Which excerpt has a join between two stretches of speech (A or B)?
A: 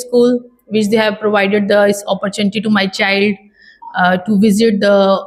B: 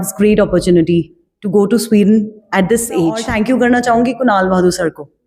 B